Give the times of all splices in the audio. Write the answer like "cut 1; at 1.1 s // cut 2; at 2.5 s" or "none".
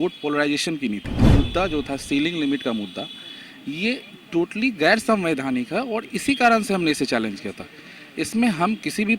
cut 1; at 1.3 s